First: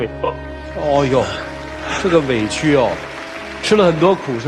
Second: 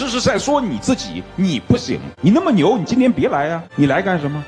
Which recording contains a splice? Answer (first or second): second